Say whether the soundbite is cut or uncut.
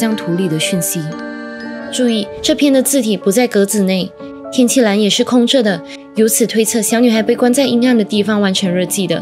cut